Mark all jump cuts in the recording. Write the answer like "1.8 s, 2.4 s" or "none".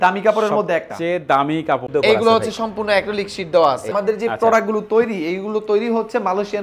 1.8 s, 3.9 s